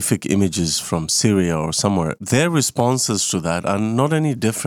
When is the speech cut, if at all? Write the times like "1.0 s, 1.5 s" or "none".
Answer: 2.2 s